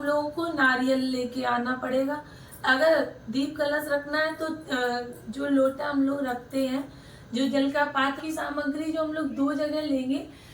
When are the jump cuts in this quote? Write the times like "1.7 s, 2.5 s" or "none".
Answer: 8.2 s